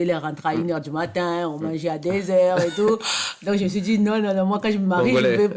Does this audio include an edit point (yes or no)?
no